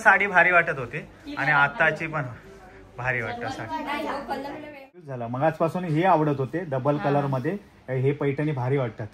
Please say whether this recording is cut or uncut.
cut